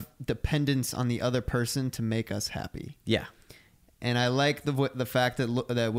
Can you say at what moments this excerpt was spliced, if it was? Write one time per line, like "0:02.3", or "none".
none